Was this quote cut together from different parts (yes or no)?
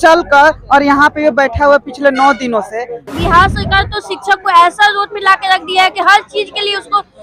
yes